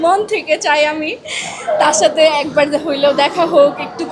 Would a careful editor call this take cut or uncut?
uncut